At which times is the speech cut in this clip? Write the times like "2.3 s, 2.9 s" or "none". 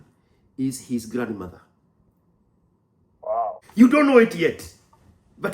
3.6 s